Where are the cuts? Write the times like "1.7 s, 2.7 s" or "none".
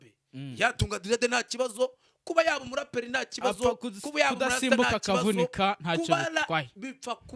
none